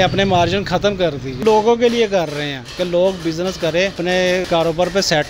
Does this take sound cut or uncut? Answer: cut